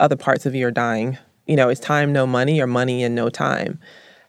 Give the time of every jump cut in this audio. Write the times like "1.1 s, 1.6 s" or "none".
1.4 s

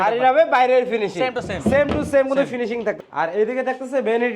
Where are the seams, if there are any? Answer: 3.0 s

